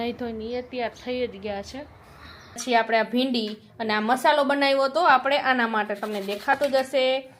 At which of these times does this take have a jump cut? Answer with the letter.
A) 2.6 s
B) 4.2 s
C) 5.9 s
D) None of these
A